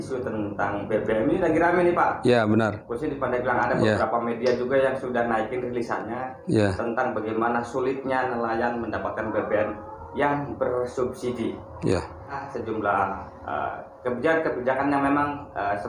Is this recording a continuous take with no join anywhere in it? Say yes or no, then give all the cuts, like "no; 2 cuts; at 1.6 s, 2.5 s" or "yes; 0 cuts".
no; 1 cut; at 12.4 s